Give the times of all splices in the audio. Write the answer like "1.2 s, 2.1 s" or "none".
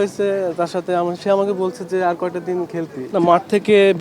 3.1 s